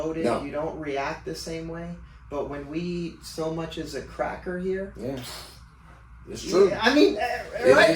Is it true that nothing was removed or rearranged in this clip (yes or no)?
yes